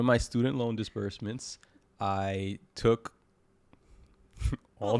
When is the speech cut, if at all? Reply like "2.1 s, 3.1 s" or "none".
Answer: none